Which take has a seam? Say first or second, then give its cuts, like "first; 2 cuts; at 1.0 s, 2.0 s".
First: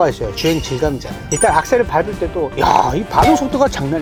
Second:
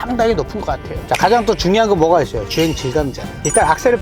second; 1 cut; at 1.0 s